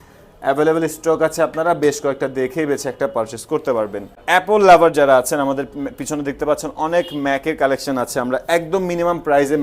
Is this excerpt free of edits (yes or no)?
no